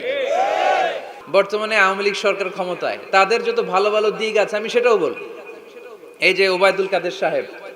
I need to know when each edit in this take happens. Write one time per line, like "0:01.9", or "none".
0:01.1